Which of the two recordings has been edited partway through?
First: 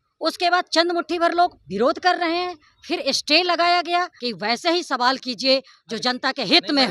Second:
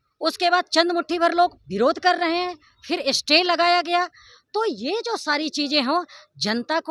first; 1 cut; at 4.2 s

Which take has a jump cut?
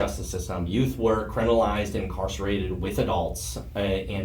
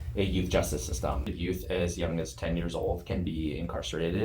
second; 1 cut; at 1.3 s

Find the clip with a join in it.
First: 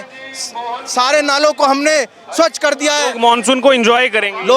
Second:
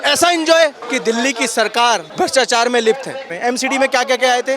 second; 3 cuts; at 0.9 s, 2.1 s, 3.3 s

